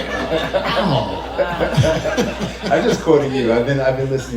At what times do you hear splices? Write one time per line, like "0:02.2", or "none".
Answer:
none